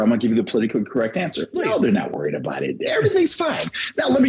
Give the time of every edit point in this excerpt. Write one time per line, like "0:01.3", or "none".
none